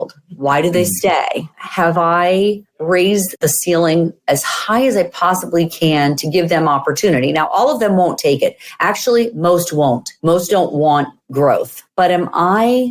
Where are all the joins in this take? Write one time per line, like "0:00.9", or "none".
0:03.3